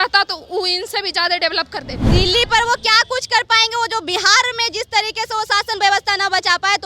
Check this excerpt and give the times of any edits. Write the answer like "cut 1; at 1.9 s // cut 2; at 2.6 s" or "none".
cut 1; at 2.0 s

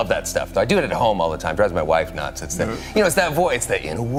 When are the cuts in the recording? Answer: none

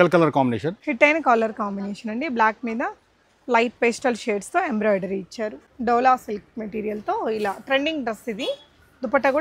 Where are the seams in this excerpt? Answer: cut 1; at 0.8 s // cut 2; at 5.6 s

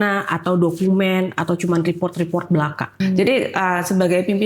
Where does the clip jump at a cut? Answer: cut 1; at 3.0 s

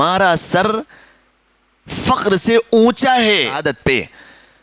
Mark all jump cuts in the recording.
cut 1; at 3.6 s

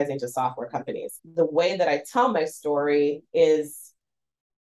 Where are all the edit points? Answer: cut 1; at 1.1 s

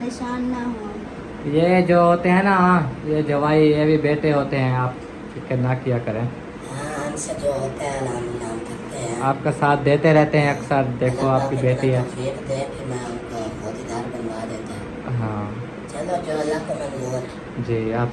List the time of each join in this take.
none

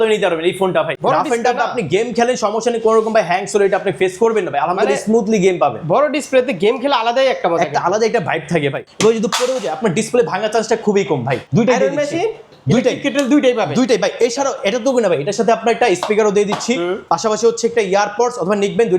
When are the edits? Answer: cut 1; at 1.0 s // cut 2; at 8.8 s // cut 3; at 11.4 s // cut 4; at 12.5 s

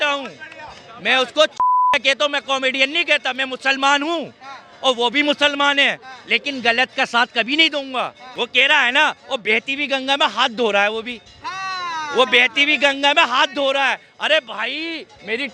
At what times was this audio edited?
cut 1; at 8.2 s

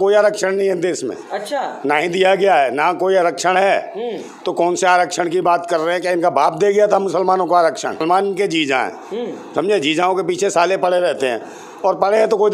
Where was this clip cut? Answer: cut 1; at 8.0 s

